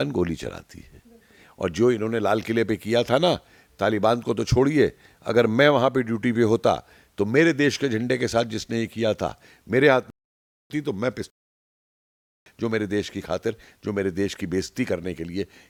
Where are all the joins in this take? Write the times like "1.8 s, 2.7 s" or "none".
none